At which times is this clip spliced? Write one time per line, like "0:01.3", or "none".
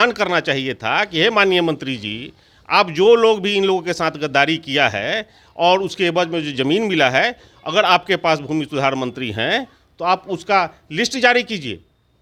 none